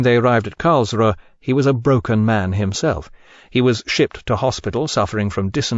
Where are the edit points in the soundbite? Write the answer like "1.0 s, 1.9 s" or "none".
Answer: 1.1 s